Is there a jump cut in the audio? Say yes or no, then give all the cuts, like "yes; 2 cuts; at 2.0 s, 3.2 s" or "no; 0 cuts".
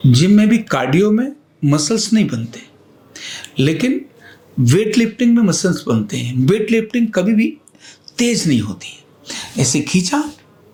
no; 0 cuts